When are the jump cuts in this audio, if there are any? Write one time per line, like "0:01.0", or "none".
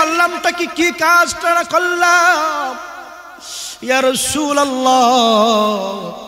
none